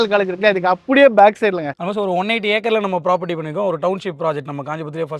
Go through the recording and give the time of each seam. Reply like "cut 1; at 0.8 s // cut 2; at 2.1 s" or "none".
cut 1; at 1.7 s